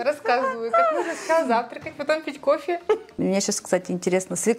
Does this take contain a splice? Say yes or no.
yes